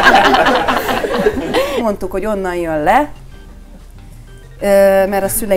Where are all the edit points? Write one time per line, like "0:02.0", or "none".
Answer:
0:01.8